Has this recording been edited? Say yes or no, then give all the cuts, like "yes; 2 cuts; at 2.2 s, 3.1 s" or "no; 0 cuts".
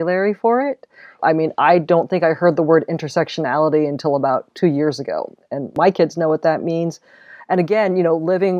no; 0 cuts